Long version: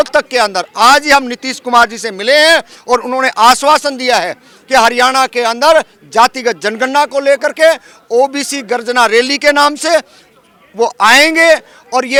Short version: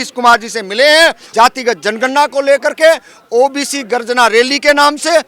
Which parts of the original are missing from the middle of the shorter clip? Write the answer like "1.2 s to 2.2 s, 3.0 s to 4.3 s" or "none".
2.7 s to 6.0 s

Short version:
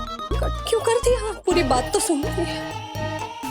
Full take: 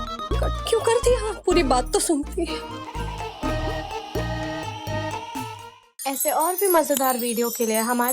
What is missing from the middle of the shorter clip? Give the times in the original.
2.5 s to 4.4 s

